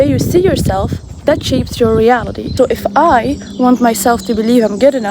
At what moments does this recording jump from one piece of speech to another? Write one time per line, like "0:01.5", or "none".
0:02.4